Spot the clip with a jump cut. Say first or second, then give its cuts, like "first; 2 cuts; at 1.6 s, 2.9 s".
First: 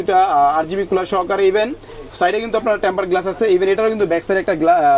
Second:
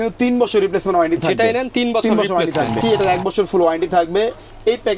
second; 1 cut; at 2.8 s